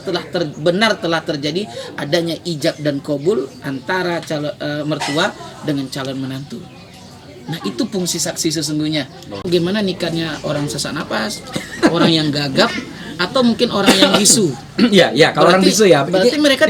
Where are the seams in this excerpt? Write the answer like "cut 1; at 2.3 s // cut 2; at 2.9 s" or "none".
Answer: cut 1; at 9.4 s